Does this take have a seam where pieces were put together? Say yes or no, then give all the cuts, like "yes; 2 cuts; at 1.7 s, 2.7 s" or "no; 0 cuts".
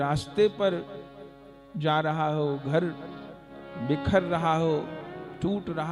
no; 0 cuts